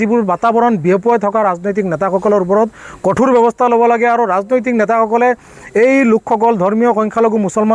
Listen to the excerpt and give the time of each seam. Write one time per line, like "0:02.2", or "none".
none